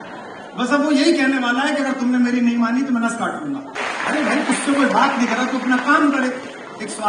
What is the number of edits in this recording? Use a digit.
1